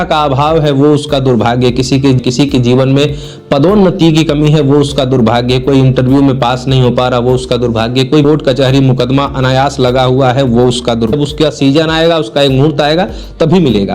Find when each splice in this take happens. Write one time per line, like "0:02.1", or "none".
0:02.2
0:08.2
0:11.1